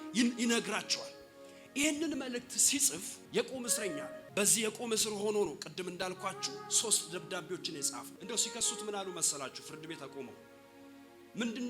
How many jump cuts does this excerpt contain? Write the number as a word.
three